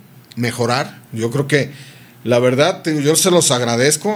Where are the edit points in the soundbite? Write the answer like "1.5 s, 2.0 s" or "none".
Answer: 1.0 s